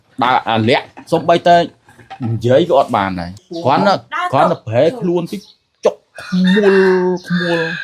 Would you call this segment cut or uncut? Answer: cut